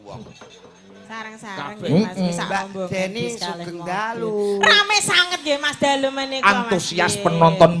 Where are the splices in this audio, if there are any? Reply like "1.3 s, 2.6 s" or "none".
1.3 s

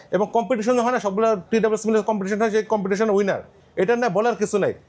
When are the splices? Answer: 3.5 s

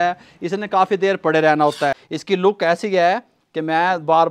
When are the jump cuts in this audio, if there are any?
2.1 s

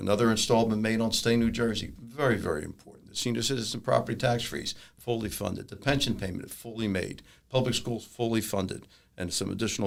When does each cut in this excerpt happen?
none

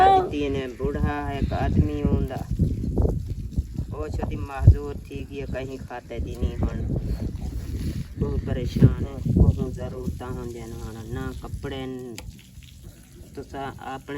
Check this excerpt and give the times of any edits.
9.1 s

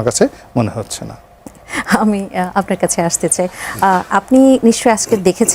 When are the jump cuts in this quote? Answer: none

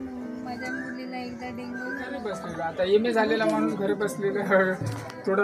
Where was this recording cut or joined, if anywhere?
2.4 s

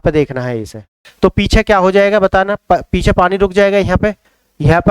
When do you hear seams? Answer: 1.0 s

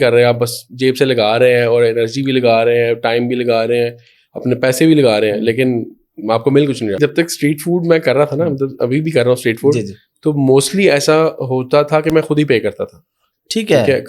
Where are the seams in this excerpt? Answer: 7.0 s

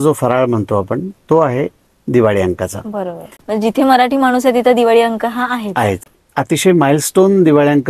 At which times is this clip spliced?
3.3 s, 6.1 s

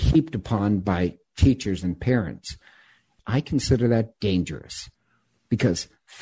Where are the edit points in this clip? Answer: 3.2 s

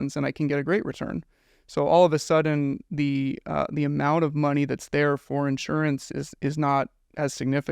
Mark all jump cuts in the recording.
none

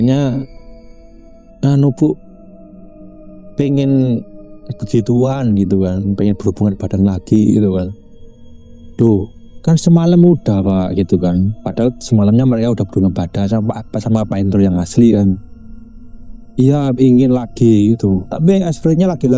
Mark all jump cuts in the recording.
none

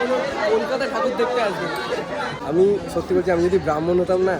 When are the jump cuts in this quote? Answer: 2.4 s

